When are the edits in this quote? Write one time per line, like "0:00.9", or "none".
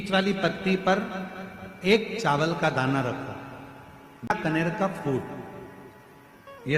0:04.3